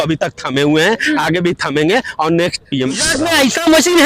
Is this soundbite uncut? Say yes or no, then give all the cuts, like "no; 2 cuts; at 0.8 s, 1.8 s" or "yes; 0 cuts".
no; 1 cut; at 3.1 s